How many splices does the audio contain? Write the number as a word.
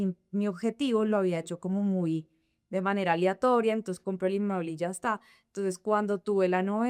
zero